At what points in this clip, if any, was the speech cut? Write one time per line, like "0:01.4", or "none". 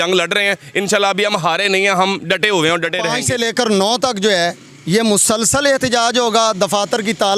0:03.1